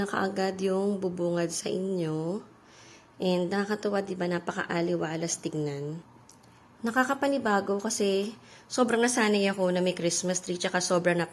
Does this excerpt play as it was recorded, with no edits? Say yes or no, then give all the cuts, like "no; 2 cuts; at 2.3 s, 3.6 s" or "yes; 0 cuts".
yes; 0 cuts